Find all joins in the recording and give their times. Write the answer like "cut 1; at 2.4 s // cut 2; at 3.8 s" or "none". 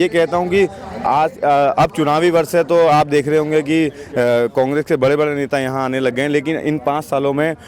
none